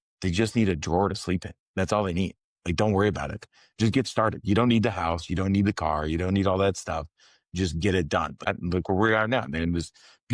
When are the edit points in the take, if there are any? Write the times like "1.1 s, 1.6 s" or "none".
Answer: 8.3 s

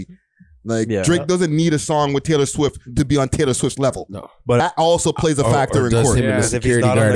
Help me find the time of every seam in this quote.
4.6 s

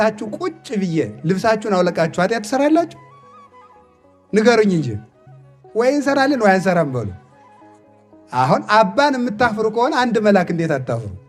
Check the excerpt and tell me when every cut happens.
none

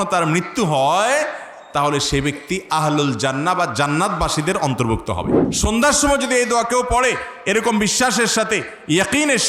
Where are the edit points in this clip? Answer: 5.4 s

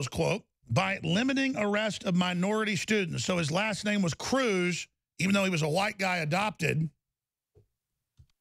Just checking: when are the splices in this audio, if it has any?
none

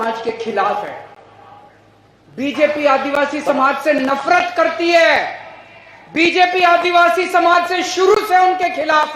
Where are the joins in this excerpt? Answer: none

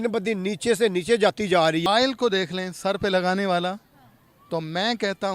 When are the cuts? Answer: 1.8 s

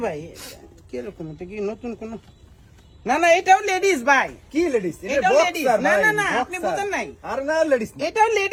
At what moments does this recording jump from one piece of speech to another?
none

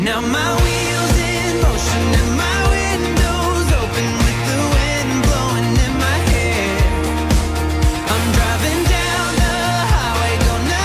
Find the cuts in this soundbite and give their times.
none

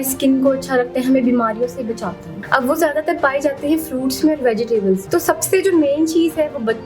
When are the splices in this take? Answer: 2.3 s, 5.0 s

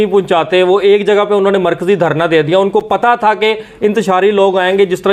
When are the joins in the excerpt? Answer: none

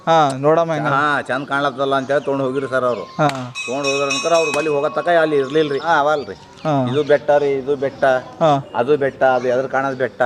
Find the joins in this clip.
5.8 s

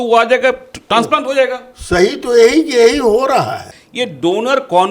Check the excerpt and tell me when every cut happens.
3.7 s

